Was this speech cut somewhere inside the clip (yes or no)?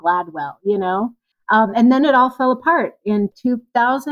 yes